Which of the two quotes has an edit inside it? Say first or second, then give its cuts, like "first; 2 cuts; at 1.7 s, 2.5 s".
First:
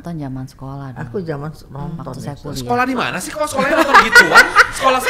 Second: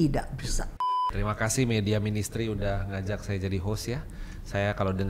second; 1 cut; at 1.0 s